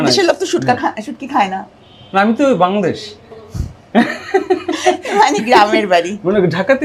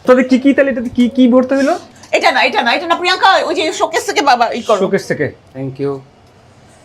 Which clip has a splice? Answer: second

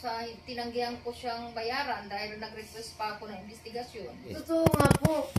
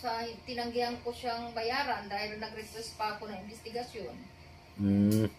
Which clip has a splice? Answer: first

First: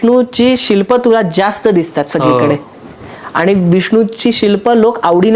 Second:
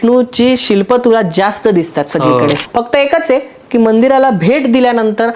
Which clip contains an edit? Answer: second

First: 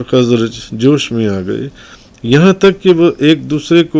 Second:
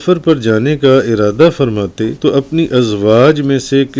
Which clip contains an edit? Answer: second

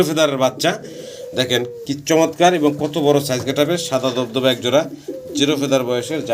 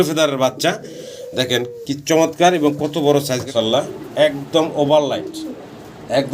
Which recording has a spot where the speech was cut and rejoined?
second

